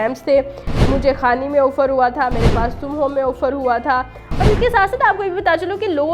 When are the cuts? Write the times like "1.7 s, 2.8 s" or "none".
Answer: none